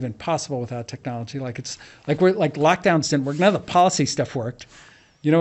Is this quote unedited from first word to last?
yes; 0 cuts

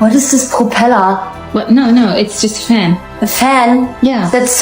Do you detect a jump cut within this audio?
no; 0 cuts

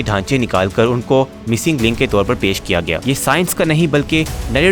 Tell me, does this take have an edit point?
yes; 1 cut; at 3.0 s

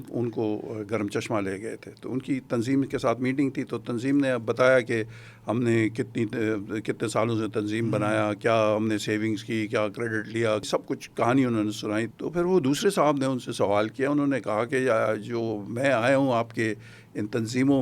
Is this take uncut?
no; 2 cuts; at 10.6 s, 12.1 s

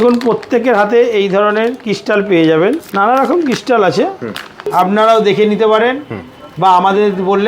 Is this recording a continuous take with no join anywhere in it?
no; 2 cuts; at 2.8 s, 4.6 s

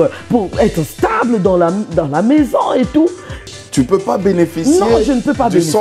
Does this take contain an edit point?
yes; 1 cut; at 3.4 s

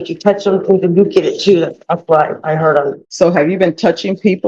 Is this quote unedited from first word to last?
no; 1 cut; at 3.0 s

